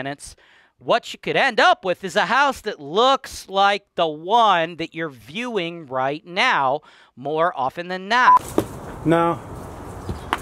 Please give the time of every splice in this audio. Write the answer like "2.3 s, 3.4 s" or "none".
8.4 s